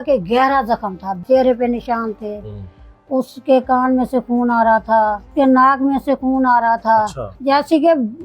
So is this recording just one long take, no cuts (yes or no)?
no